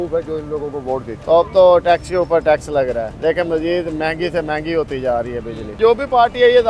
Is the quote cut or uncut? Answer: cut